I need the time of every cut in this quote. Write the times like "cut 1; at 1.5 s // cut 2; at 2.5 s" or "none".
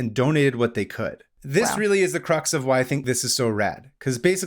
cut 1; at 1.3 s // cut 2; at 3.0 s